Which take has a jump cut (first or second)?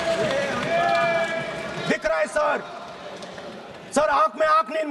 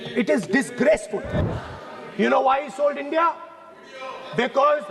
second